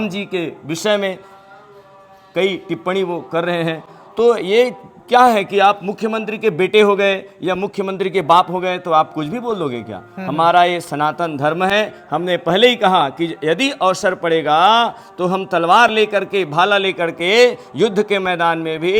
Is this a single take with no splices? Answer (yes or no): yes